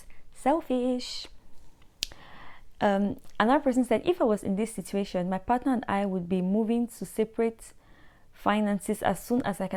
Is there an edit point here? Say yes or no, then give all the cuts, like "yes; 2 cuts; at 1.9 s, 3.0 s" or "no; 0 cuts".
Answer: no; 0 cuts